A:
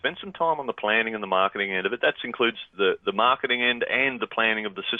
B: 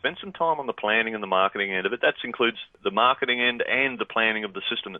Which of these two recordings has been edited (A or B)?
B